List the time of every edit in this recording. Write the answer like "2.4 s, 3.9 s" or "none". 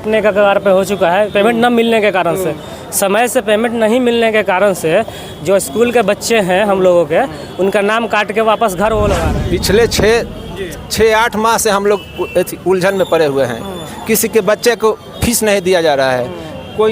9.3 s

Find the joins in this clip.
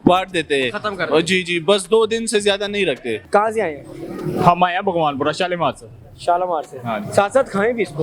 3.2 s

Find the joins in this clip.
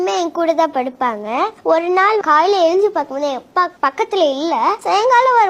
2.2 s, 3.7 s

